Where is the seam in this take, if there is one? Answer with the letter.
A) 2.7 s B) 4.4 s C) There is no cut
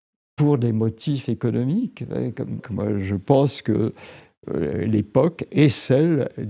A